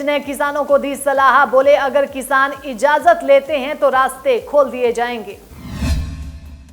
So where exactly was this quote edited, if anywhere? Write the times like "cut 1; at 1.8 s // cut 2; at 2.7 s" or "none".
cut 1; at 5.5 s